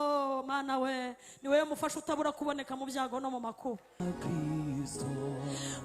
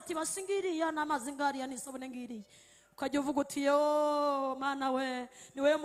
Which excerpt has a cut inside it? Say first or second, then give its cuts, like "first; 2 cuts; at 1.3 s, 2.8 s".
first; 1 cut; at 4.0 s